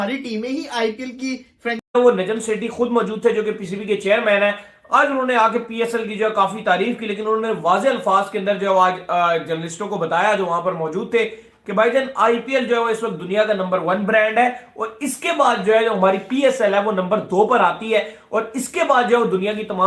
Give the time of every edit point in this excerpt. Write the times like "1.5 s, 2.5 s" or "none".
1.9 s